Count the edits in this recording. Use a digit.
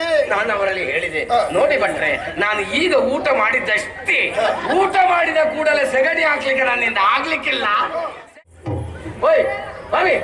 1